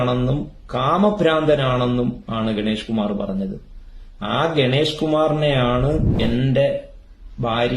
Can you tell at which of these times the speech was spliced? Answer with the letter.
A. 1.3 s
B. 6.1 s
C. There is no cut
B